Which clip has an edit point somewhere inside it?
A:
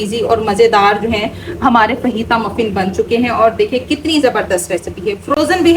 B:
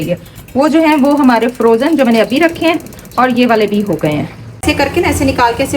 B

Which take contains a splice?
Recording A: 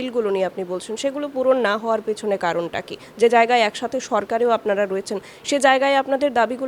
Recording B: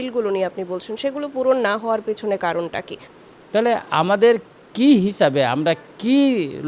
B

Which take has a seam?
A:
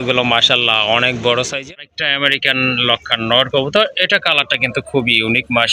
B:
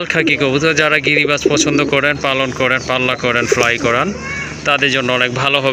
A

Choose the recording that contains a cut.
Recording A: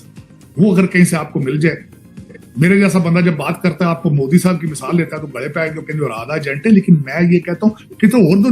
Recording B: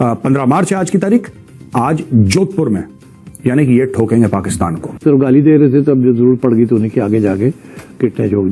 B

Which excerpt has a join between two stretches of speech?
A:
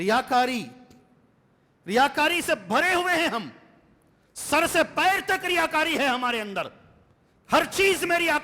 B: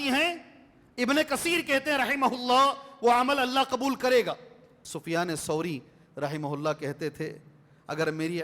B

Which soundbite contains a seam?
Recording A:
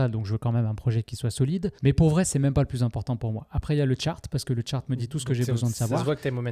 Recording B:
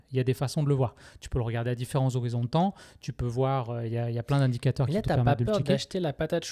A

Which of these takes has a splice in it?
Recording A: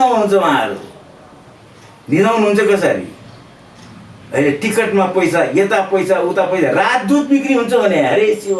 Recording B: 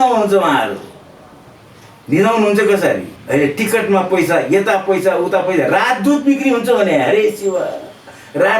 B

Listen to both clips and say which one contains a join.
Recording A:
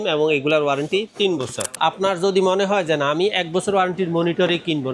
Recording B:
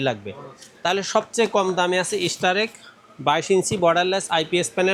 A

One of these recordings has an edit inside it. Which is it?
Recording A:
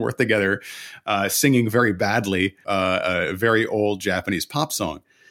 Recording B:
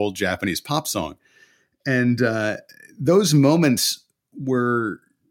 A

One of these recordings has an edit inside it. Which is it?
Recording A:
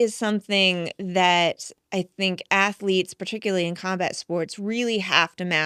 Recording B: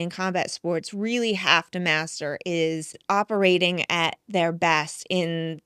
B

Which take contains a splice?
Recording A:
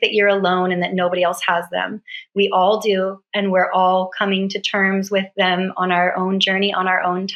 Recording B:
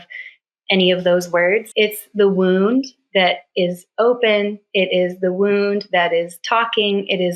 B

